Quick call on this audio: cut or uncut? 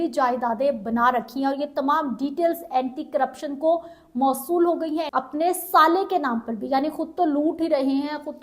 cut